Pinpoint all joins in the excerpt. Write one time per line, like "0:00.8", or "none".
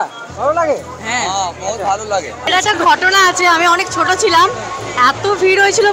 0:02.5